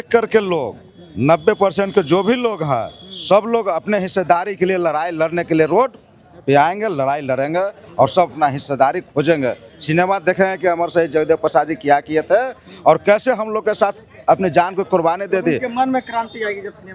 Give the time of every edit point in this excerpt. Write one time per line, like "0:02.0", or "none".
none

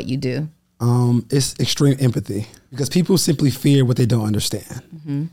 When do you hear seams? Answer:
0:02.8

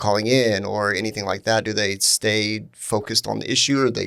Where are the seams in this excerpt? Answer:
none

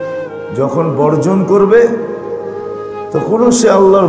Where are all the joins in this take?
none

